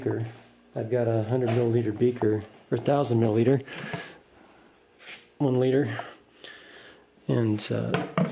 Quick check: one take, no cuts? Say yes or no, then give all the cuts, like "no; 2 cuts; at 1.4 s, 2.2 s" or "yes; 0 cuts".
no; 1 cut; at 1.0 s